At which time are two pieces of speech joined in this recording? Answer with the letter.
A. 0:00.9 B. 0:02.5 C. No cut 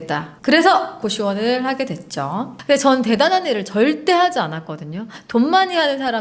B